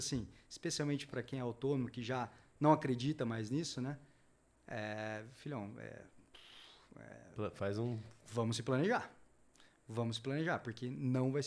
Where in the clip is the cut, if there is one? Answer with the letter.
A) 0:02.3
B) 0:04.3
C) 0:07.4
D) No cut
D